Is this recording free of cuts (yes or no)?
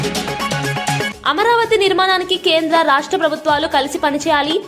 no